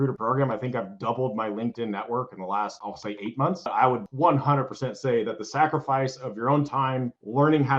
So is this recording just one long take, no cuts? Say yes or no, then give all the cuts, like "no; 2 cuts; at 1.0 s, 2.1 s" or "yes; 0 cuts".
no; 1 cut; at 3.7 s